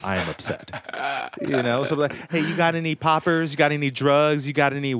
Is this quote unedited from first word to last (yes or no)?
no